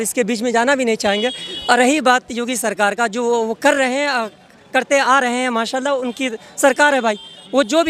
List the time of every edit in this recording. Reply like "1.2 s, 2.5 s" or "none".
none